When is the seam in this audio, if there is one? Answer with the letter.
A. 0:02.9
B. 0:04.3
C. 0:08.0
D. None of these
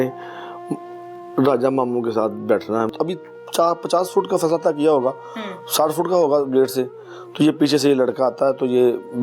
A